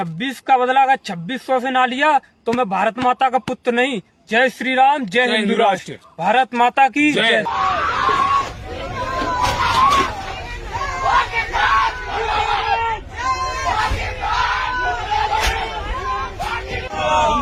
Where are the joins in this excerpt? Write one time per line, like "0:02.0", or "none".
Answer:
none

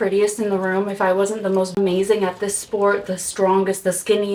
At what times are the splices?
none

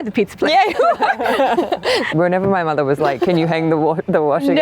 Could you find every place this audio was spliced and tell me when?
0:02.1

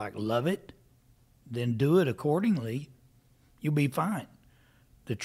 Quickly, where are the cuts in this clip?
none

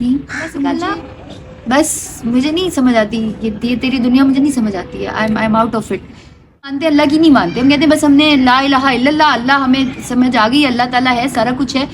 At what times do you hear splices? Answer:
0:00.8
0:06.7

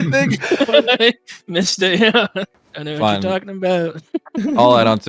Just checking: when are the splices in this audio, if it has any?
none

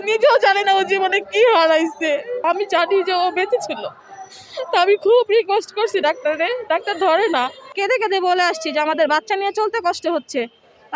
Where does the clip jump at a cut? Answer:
0:02.4
0:07.6

